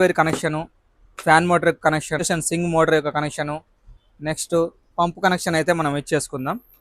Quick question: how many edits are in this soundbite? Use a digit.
0